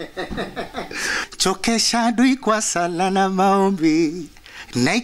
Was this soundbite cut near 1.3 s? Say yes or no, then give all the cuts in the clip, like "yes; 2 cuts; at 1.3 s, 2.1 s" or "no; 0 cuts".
yes; 1 cut; at 1.3 s